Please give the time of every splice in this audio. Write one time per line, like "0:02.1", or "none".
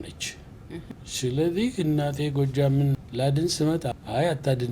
0:00.9
0:03.0
0:03.9